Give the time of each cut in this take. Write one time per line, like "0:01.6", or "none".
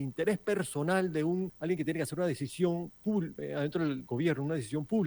0:01.5
0:03.4